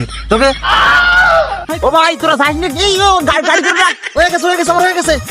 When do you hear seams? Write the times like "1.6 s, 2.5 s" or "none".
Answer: 1.7 s